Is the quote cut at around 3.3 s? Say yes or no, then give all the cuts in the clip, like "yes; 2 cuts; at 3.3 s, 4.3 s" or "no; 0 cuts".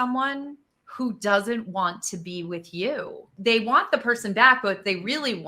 yes; 1 cut; at 3.3 s